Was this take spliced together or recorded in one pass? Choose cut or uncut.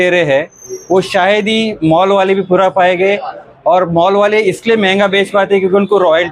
uncut